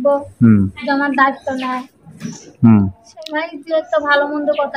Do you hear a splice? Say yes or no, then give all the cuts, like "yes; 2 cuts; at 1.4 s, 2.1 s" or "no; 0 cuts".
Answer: no; 0 cuts